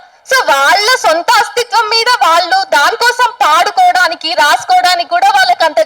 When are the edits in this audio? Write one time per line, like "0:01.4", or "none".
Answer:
none